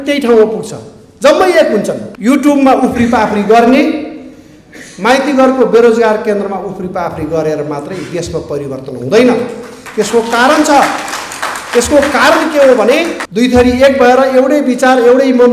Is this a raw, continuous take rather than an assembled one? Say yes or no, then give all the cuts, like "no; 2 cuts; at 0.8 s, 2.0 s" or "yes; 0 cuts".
no; 2 cuts; at 2.0 s, 13.2 s